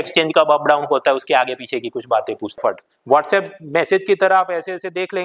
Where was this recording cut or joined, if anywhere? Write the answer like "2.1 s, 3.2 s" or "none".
2.6 s